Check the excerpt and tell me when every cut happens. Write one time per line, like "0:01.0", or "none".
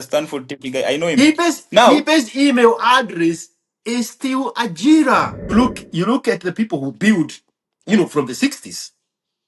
0:05.5